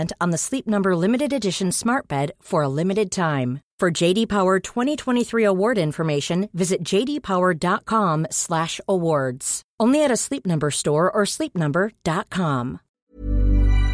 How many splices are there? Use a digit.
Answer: 1